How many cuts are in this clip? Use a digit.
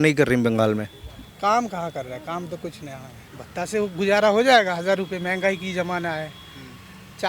0